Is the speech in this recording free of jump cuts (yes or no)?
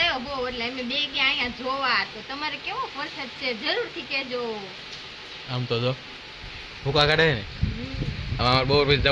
yes